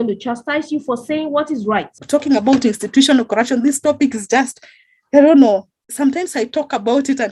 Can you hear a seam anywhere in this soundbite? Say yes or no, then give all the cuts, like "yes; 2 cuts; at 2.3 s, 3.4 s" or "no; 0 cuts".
yes; 1 cut; at 2.0 s